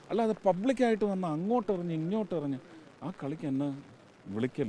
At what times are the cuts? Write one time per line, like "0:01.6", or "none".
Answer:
none